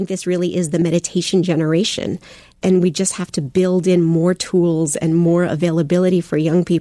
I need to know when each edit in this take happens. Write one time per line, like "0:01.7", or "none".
0:00.8
0:02.5